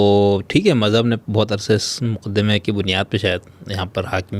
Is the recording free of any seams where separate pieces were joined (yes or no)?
yes